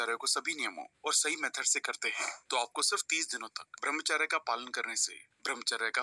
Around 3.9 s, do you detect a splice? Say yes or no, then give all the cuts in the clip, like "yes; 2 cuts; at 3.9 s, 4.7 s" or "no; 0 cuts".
no; 0 cuts